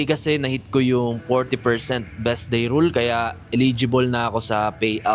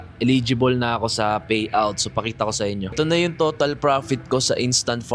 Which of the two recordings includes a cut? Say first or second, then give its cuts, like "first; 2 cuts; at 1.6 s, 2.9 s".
second; 1 cut; at 2.9 s